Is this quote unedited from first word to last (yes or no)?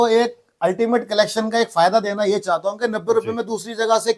yes